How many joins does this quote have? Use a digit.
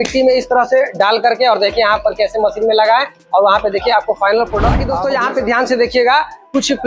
1